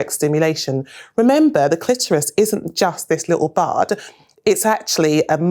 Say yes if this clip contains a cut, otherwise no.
no